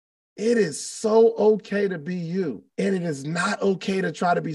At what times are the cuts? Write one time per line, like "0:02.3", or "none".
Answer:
0:02.6